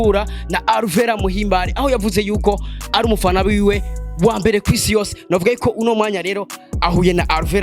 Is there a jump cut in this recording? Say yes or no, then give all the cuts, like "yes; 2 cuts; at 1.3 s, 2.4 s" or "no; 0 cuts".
no; 0 cuts